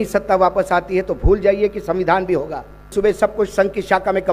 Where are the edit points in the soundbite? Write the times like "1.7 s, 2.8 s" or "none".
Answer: 2.9 s